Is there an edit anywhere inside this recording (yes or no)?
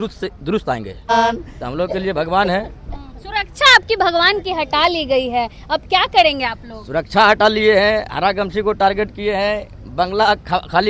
yes